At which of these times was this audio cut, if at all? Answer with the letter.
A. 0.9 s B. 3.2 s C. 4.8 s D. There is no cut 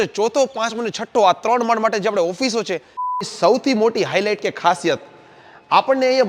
B